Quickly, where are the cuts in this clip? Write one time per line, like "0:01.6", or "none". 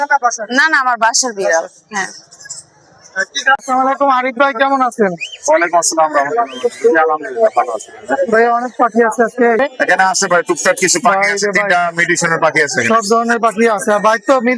0:03.6
0:09.6